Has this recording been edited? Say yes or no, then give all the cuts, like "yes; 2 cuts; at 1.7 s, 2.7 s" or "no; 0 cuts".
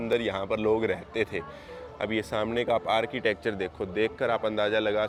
no; 0 cuts